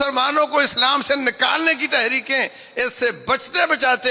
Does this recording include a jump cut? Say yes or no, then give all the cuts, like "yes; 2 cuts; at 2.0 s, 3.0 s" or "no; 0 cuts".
no; 0 cuts